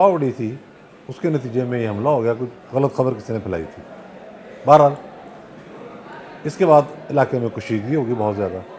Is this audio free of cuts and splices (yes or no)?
yes